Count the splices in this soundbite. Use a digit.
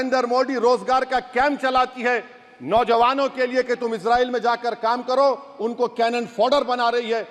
0